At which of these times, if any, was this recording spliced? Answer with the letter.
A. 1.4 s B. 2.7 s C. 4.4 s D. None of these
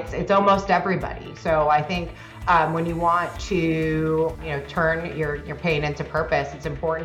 C